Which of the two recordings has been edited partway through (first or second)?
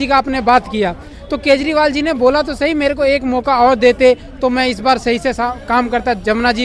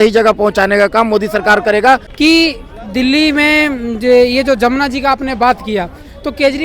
second